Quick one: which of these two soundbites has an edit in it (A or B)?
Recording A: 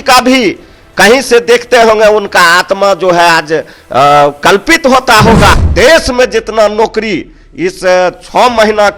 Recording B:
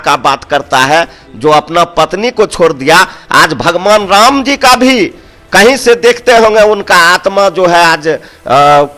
A